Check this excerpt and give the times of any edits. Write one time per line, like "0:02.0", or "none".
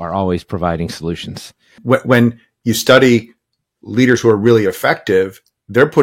0:01.8